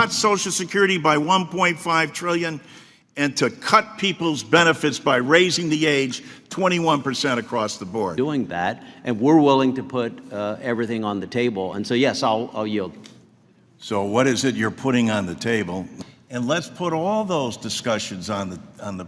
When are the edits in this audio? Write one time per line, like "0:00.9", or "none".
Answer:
0:08.1
0:16.0